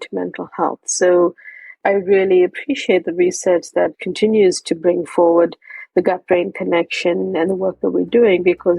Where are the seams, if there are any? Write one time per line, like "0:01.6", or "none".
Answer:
0:01.8
0:04.0